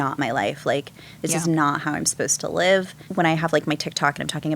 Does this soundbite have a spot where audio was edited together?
yes; 1 cut; at 3.0 s

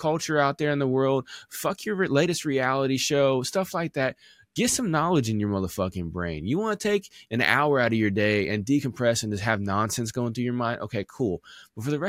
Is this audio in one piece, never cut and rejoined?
yes; 0 cuts

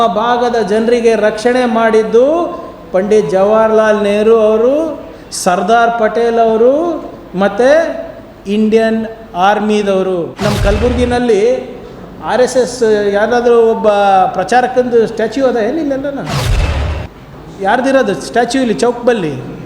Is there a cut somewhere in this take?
yes; 1 cut; at 10.3 s

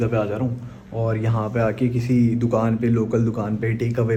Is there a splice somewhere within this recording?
no; 0 cuts

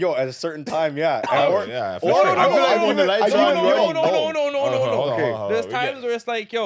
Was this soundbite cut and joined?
no; 0 cuts

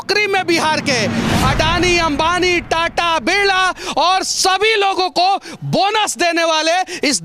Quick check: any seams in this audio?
yes; 1 cut; at 1.2 s

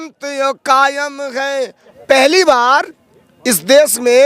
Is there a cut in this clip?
yes; 1 cut; at 1.8 s

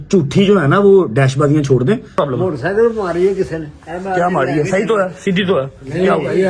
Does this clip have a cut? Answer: yes; 1 cut; at 2.1 s

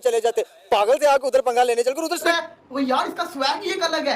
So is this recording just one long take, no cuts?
no; 1 cut; at 2.3 s

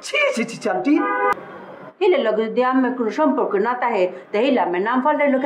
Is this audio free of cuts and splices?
no; 1 cut; at 1.4 s

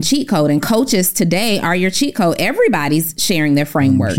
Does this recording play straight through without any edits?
yes; 0 cuts

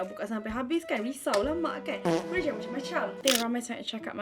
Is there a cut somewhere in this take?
yes; 1 cut; at 3.2 s

